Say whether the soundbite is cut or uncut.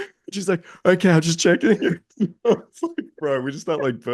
uncut